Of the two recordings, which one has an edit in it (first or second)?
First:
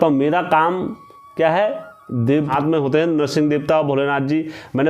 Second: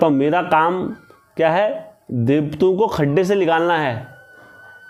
first